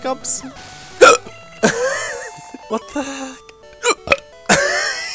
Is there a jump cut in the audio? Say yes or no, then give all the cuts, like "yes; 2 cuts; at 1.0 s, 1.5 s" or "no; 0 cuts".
yes; 1 cut; at 2.5 s